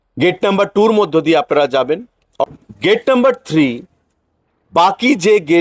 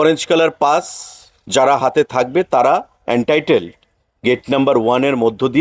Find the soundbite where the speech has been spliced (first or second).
first